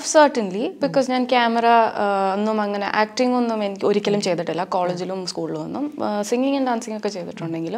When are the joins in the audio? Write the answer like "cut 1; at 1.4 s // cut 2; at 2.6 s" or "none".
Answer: none